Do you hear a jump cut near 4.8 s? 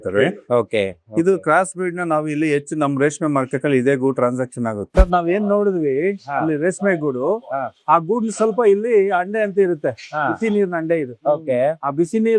yes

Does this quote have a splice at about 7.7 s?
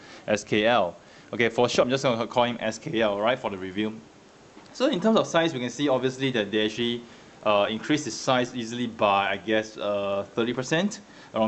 no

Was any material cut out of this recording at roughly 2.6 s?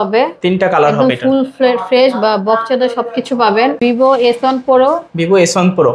no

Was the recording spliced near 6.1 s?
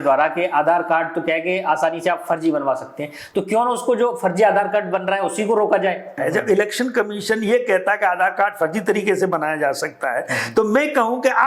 yes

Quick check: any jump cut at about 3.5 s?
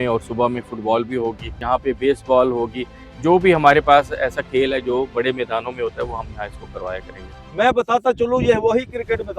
no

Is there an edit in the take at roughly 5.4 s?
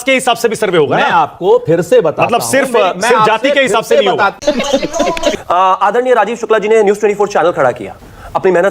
yes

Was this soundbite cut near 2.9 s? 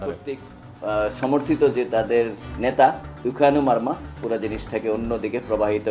no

